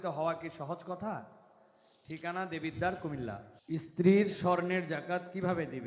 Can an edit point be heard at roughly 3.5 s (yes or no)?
yes